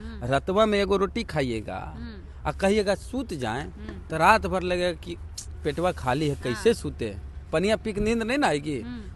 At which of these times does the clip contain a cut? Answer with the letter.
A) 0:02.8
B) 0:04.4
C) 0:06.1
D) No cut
D